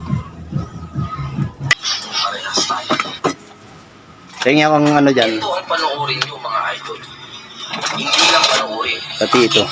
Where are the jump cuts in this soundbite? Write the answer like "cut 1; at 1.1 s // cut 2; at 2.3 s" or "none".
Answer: cut 1; at 1.7 s